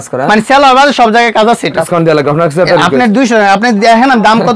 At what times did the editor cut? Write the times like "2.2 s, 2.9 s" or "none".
1.9 s